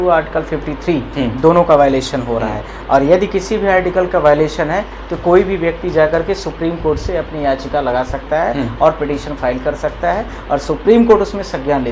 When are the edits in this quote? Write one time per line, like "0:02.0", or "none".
none